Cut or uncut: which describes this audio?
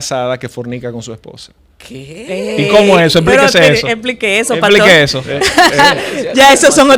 uncut